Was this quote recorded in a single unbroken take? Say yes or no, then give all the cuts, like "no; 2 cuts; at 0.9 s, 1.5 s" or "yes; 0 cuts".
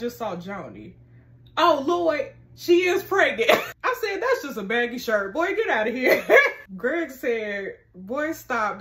no; 2 cuts; at 3.7 s, 6.6 s